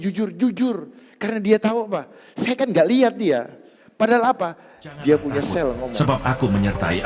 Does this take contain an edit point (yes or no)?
yes